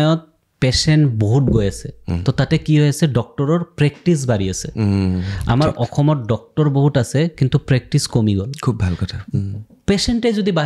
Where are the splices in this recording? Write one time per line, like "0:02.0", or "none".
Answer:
none